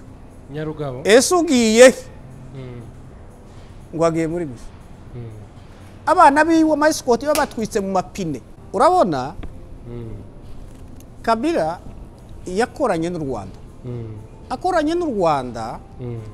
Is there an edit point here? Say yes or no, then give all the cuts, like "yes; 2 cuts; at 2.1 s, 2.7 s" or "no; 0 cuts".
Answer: yes; 1 cut; at 8.5 s